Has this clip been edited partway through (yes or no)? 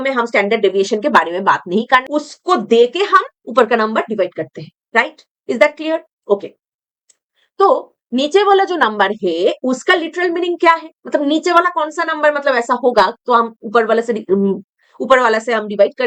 yes